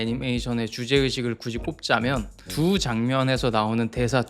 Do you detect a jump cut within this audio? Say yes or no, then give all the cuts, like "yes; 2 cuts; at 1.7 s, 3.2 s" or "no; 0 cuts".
yes; 1 cut; at 2.4 s